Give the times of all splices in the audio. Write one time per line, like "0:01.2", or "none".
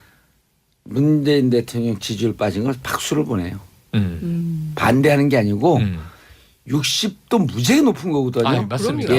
0:02.8